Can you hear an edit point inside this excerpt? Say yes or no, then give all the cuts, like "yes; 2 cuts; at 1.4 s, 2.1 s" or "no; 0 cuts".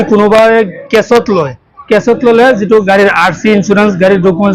no; 0 cuts